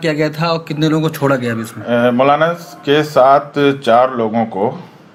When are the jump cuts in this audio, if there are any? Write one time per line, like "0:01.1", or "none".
none